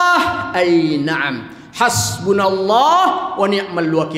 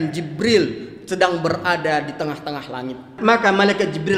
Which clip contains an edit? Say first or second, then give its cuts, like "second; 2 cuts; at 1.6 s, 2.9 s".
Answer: second; 1 cut; at 3.2 s